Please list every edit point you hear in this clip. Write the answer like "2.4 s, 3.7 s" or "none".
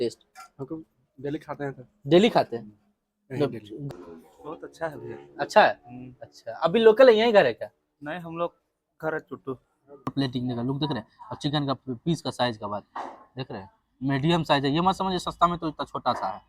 3.8 s, 10.1 s